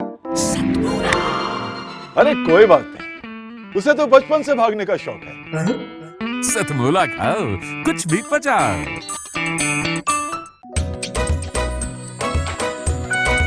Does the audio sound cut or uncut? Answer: uncut